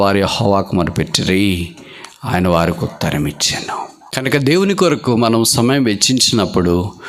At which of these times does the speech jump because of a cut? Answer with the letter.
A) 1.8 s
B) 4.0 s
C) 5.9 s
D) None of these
B